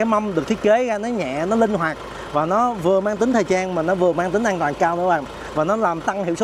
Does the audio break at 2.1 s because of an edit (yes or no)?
no